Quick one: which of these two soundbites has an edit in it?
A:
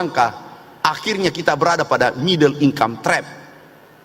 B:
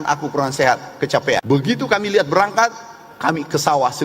B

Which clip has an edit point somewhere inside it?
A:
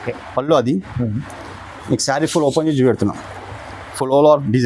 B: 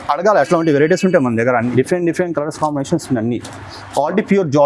B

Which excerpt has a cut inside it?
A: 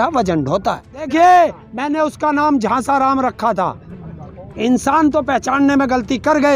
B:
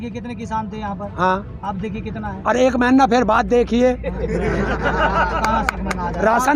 A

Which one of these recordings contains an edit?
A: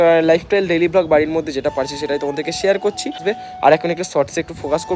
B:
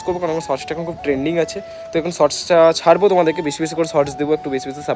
A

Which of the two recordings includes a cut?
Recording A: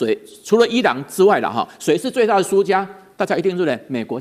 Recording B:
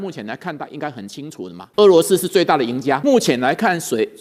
B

